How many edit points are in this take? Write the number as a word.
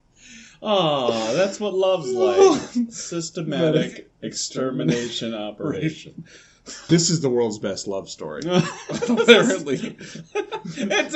one